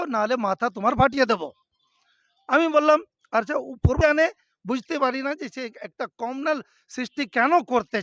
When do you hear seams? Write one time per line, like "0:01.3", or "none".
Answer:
0:04.0